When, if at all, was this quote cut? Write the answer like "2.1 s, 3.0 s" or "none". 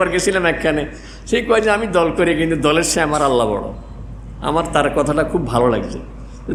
none